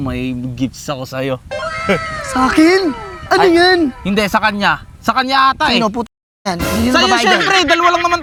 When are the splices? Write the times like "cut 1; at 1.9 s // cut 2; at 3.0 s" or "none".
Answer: none